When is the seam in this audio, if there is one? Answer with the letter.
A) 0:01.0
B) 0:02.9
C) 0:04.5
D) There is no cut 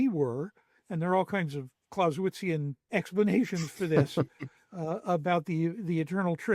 B